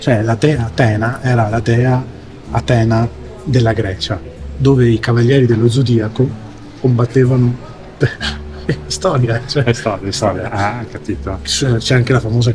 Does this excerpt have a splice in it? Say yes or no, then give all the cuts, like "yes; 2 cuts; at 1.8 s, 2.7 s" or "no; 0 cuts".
no; 0 cuts